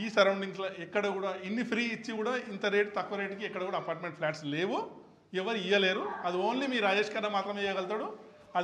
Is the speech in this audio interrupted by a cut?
no; 0 cuts

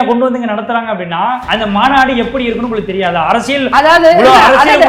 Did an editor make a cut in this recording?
yes; 1 cut; at 1.4 s

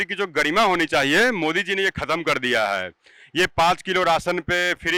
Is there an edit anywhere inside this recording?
no; 0 cuts

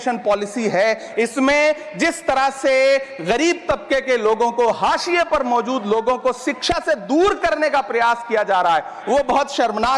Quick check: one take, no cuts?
yes; 0 cuts

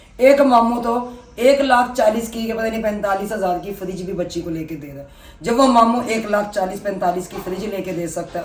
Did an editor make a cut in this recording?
no; 0 cuts

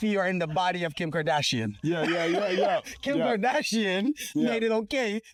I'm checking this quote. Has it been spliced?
no; 0 cuts

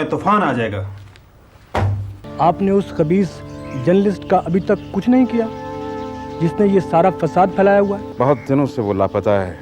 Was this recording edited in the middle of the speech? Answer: yes; 2 cuts; at 2.2 s, 8.1 s

